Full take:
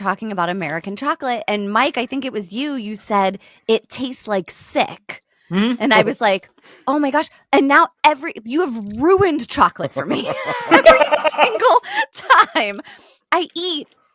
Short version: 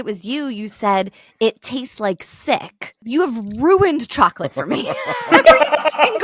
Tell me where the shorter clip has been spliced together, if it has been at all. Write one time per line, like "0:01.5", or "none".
0:02.9